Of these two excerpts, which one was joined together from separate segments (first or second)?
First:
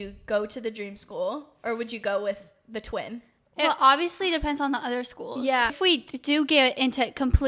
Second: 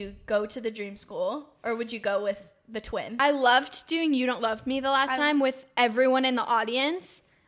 second